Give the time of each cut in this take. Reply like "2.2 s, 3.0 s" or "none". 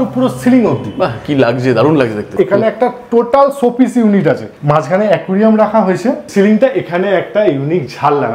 2.3 s, 4.5 s, 6.3 s